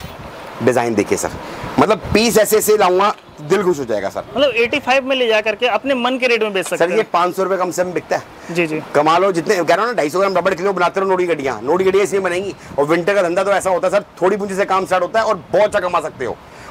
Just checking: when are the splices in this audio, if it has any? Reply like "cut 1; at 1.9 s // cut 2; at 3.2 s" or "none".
none